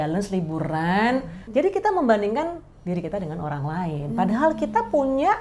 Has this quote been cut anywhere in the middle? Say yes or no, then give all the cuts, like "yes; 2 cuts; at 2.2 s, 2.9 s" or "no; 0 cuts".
yes; 1 cut; at 1.4 s